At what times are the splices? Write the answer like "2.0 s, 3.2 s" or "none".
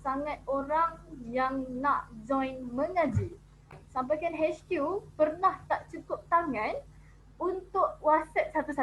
3.8 s